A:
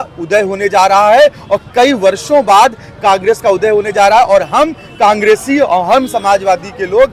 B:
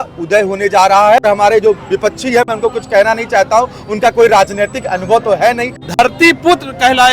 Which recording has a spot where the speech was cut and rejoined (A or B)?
B